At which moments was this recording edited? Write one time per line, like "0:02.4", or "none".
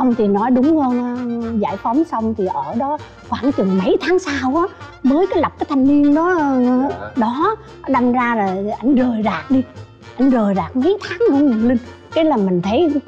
none